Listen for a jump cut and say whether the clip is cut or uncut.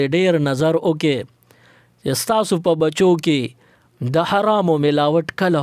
uncut